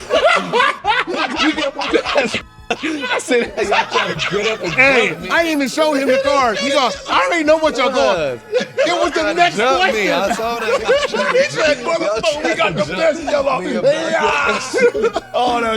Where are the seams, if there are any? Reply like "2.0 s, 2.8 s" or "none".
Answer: 5.2 s